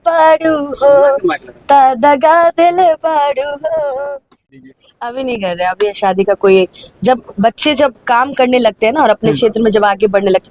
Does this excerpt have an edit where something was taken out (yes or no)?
yes